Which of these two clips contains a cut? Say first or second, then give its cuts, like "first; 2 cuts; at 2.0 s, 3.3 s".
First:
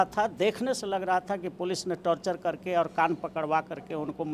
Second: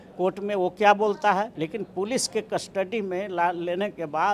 second; 1 cut; at 1.6 s